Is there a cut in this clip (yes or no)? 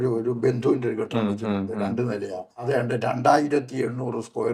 yes